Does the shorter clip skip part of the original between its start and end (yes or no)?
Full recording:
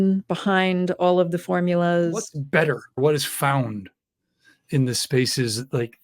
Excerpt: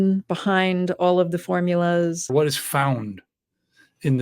yes